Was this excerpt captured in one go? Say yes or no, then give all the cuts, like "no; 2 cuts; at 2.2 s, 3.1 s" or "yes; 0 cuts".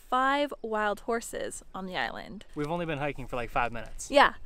no; 1 cut; at 2.4 s